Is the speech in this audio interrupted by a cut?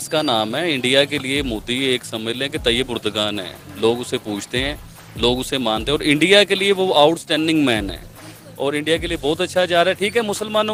no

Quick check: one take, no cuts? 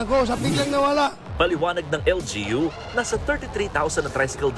no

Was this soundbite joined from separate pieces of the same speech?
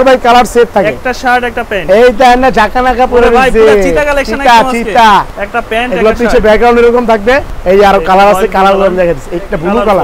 yes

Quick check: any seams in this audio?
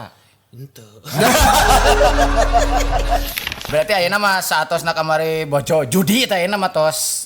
yes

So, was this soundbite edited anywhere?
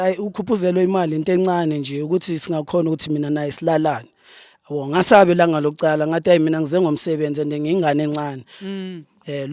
no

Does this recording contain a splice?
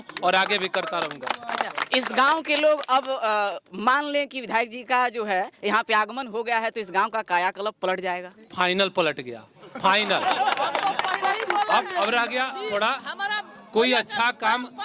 no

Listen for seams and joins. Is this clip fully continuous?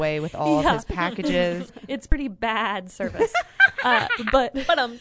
no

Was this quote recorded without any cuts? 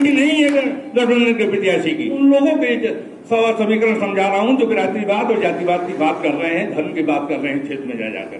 no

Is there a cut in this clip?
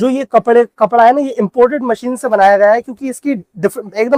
no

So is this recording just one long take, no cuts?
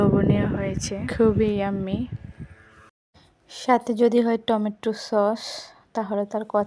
yes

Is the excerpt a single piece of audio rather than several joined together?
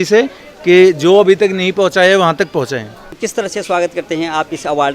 no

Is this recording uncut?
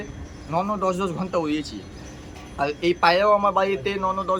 yes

